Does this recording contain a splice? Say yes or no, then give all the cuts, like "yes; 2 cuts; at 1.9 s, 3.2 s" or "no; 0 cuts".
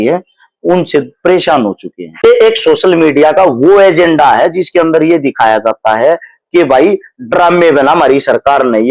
yes; 1 cut; at 2.2 s